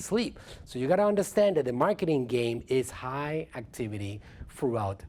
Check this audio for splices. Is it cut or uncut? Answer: uncut